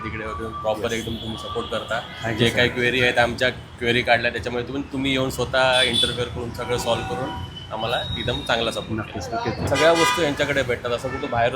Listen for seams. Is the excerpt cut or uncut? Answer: cut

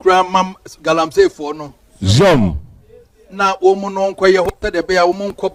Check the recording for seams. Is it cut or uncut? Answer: uncut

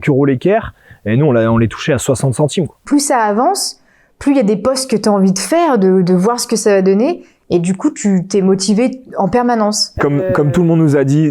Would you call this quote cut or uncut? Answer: cut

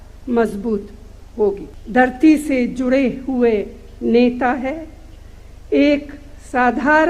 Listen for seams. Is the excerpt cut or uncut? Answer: cut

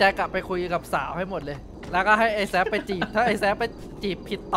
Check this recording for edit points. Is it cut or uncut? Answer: cut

